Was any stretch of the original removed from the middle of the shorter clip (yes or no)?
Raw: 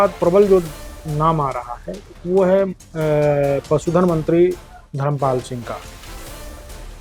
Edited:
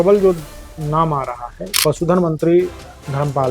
yes